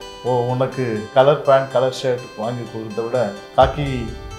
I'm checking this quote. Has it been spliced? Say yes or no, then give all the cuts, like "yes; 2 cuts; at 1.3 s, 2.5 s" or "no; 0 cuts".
yes; 1 cut; at 3.4 s